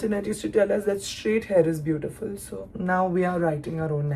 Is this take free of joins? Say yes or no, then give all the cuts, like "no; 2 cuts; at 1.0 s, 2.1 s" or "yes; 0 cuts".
yes; 0 cuts